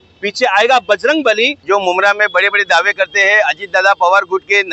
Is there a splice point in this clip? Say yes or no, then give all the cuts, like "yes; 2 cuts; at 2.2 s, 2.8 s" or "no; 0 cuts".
yes; 1 cut; at 1.6 s